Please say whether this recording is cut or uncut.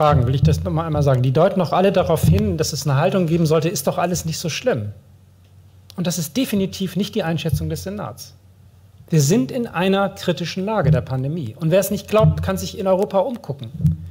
uncut